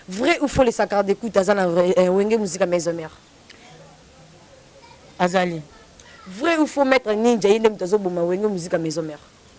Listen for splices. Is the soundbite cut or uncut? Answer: uncut